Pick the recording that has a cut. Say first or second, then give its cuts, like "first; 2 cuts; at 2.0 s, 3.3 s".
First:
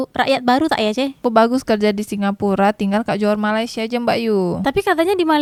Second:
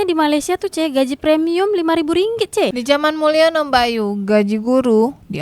second; 1 cut; at 2.7 s